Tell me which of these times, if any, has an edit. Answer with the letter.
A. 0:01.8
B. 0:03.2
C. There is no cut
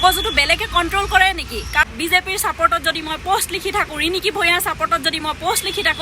A